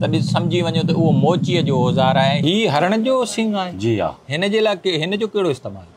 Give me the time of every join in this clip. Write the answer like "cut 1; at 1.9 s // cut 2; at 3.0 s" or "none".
cut 1; at 2.4 s